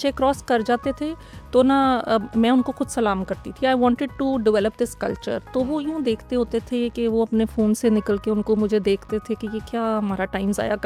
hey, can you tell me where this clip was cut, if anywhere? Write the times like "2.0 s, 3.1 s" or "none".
none